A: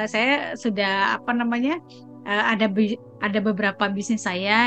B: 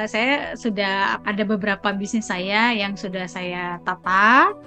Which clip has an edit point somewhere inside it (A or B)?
B